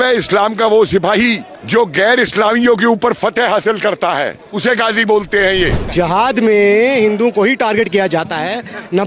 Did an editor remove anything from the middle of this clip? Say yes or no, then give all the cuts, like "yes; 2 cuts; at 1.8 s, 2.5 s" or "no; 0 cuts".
yes; 3 cuts; at 1.5 s, 4.4 s, 5.8 s